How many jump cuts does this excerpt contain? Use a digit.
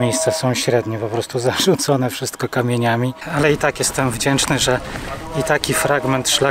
1